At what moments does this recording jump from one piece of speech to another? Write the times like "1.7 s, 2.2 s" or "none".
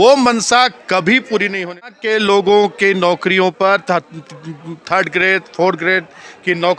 1.7 s